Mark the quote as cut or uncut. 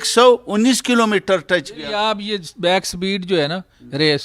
uncut